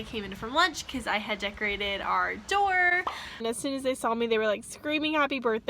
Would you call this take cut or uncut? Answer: cut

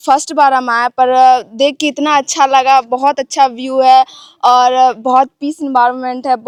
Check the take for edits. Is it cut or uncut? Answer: uncut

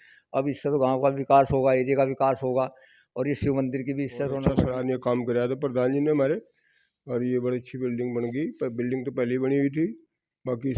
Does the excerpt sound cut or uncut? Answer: cut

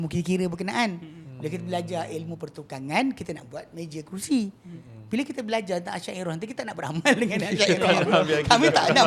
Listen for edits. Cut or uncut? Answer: uncut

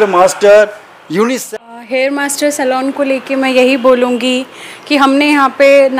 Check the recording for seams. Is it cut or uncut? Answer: cut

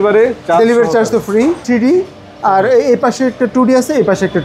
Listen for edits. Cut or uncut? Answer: cut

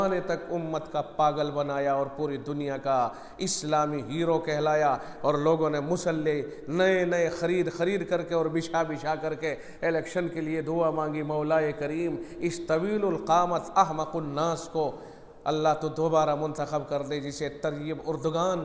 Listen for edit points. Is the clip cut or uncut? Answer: uncut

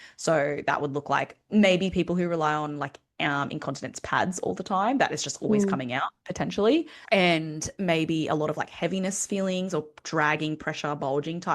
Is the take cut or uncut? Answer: cut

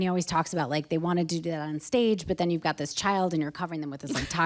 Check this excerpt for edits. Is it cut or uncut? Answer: uncut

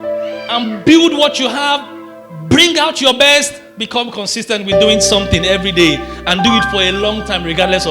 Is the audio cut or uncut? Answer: uncut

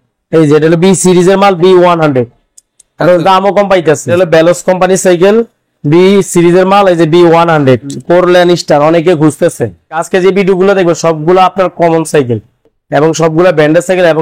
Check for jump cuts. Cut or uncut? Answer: cut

